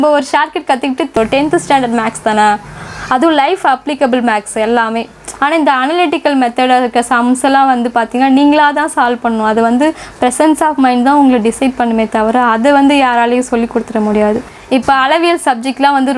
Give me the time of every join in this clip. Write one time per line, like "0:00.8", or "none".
0:01.2
0:05.3
0:14.7